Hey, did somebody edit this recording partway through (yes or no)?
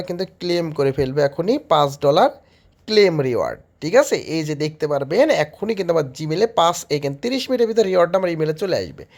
no